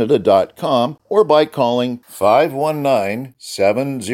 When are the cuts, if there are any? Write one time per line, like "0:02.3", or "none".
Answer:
0:01.0